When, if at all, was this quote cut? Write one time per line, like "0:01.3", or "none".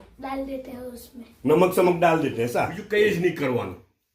0:02.8